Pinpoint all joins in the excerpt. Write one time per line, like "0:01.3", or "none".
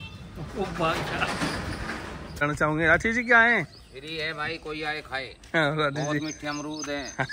0:02.4